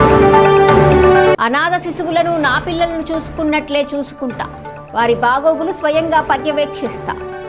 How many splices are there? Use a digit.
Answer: 1